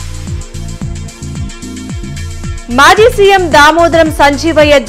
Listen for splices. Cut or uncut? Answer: cut